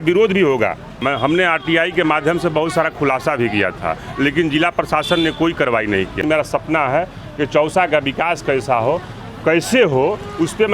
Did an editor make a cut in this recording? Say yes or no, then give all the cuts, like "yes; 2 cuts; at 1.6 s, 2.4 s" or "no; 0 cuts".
yes; 2 cuts; at 1.0 s, 6.2 s